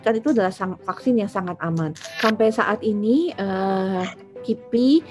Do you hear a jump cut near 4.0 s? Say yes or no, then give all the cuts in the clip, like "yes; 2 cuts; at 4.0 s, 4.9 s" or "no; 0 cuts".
no; 1 cut; at 2.0 s